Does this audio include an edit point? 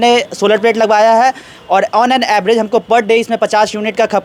no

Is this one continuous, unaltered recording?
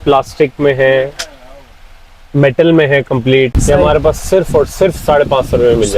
no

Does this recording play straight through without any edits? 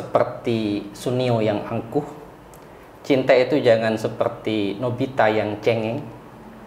yes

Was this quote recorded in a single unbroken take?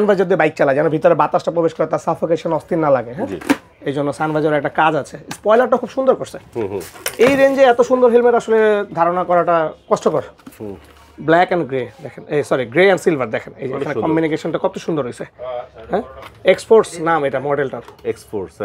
yes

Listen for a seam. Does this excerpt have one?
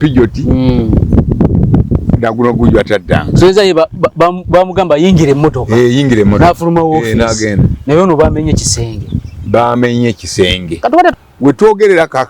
yes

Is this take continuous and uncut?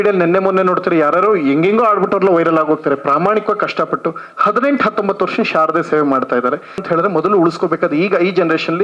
no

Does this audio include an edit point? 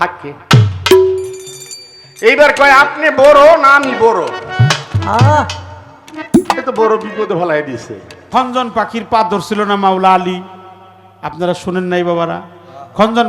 yes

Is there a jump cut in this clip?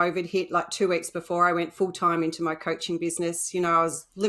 no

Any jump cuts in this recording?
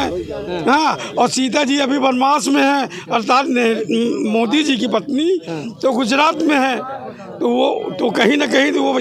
no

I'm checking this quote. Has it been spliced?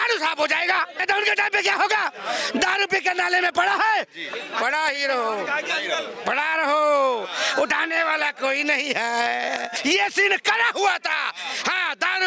yes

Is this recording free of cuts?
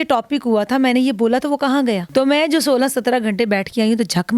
no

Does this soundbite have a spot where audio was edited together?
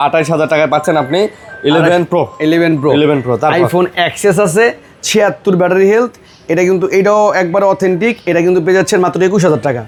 no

